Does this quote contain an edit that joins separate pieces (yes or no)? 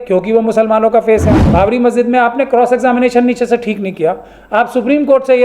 yes